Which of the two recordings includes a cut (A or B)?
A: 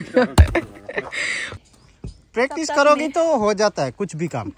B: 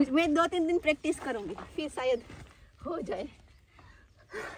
A